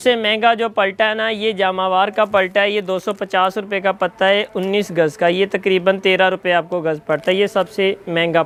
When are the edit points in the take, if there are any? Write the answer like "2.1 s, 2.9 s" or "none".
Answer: none